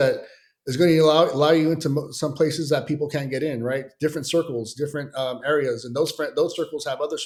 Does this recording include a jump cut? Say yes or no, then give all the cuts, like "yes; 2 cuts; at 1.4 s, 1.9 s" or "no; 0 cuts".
no; 0 cuts